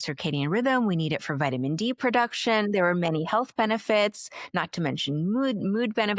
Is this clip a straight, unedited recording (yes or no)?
yes